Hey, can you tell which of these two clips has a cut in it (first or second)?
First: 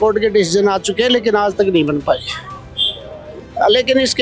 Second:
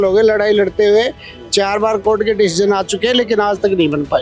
first